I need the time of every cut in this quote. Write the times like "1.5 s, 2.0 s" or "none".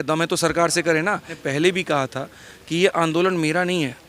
1.4 s